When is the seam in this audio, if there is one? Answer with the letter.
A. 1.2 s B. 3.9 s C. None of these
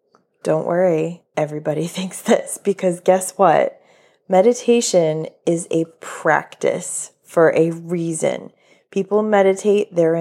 A